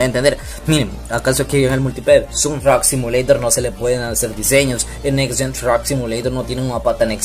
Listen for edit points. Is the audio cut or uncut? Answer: cut